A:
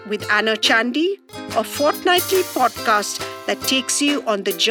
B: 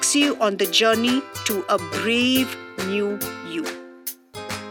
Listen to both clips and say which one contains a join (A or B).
B